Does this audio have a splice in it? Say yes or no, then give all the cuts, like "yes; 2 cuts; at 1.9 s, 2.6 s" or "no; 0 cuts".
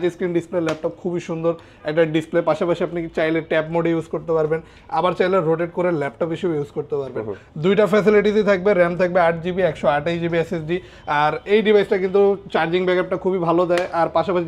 no; 0 cuts